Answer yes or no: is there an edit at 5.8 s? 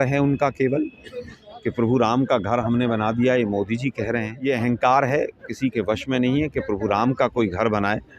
no